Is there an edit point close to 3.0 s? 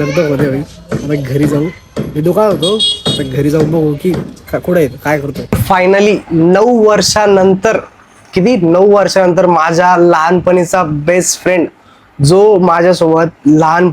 no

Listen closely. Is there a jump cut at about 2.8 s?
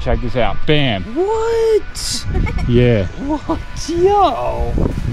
no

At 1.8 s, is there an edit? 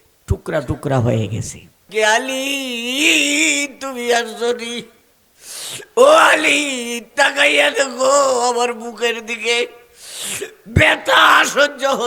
yes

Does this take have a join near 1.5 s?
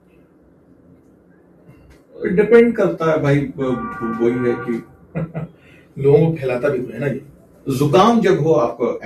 no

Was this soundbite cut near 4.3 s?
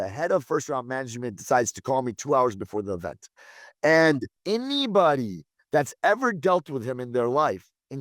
yes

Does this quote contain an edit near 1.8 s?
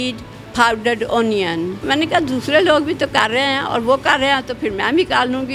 yes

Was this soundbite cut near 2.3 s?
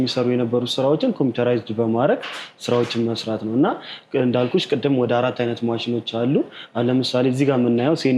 no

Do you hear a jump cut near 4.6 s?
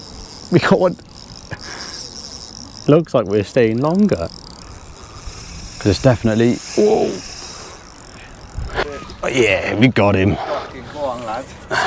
yes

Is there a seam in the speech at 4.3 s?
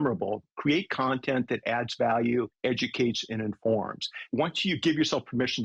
yes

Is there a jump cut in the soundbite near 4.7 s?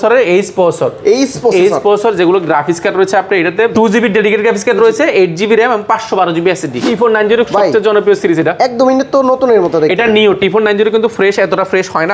no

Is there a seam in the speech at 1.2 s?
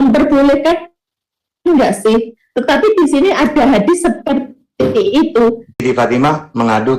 no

